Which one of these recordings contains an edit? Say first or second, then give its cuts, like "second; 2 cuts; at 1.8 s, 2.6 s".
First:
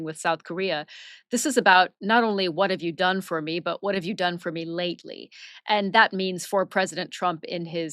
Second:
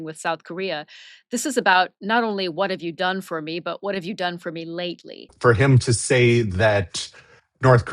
second; 1 cut; at 5.3 s